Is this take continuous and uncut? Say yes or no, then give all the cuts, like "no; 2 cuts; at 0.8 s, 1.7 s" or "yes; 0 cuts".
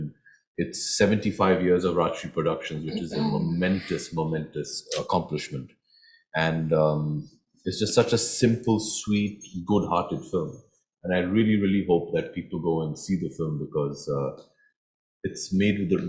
yes; 0 cuts